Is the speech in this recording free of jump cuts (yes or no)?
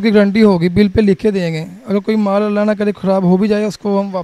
yes